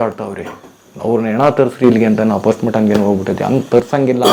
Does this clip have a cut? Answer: no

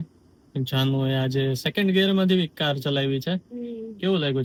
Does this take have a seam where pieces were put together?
no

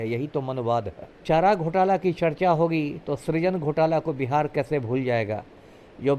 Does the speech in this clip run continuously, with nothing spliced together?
no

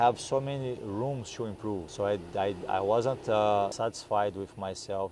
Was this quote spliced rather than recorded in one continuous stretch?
yes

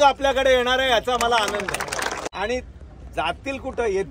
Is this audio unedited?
no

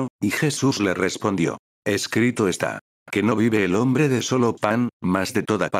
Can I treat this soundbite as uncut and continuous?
no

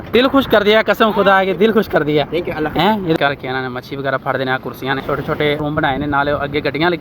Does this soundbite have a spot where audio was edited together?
yes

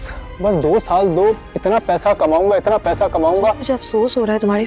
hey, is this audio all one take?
no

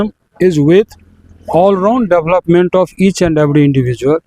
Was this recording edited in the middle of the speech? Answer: no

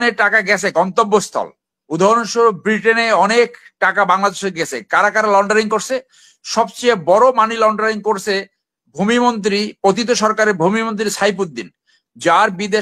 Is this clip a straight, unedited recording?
yes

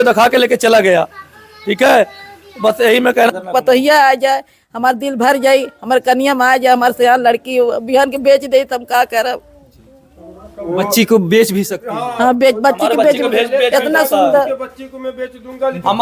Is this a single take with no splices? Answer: no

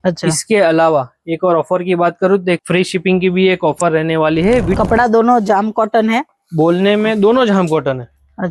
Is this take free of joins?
no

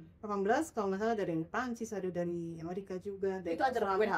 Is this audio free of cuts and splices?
yes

